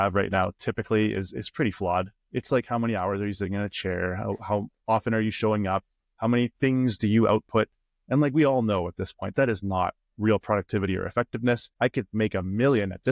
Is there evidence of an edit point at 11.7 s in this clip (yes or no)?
yes